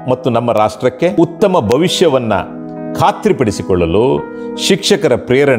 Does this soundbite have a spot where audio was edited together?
yes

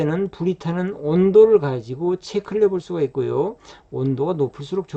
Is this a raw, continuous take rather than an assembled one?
yes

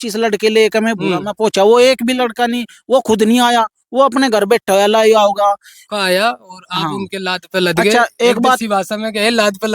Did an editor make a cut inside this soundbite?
yes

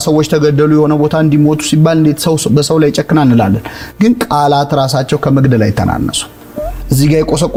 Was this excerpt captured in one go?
yes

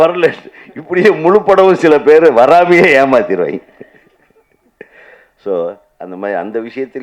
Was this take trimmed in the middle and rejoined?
no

